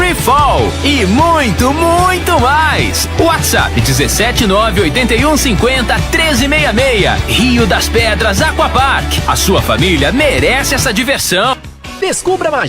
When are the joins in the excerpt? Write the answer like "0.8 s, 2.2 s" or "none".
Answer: 11.8 s